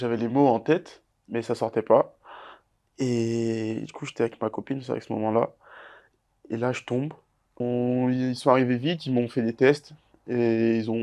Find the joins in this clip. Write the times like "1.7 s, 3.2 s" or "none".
7.6 s